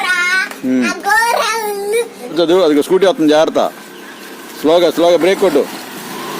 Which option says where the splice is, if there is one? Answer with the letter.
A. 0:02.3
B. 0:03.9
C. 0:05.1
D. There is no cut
A